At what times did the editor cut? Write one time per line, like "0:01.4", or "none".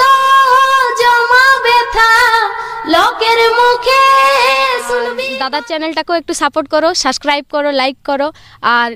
0:05.2